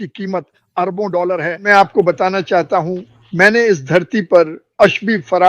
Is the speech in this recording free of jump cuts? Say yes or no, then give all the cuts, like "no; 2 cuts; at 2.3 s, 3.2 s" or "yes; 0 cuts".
no; 1 cut; at 1.6 s